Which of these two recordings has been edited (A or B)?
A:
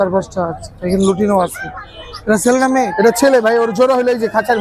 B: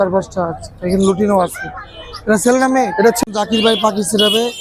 B